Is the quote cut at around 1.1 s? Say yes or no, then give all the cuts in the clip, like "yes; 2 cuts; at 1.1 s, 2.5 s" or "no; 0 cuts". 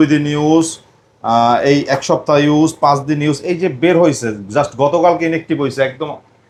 no; 0 cuts